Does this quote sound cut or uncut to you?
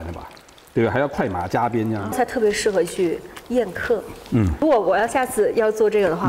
cut